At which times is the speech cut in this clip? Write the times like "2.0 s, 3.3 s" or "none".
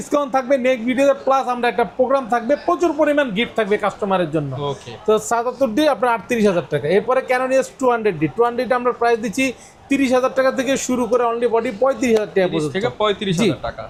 none